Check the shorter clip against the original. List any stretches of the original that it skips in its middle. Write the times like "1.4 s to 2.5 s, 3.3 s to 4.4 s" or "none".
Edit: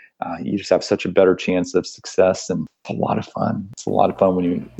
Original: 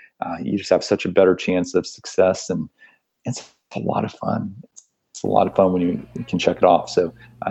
2.8 s to 3.6 s, 4.6 s to 5.1 s